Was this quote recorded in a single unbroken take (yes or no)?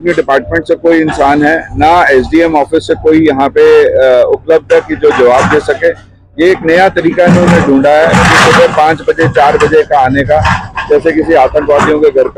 yes